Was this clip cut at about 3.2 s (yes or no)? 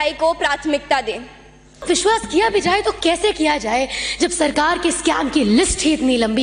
no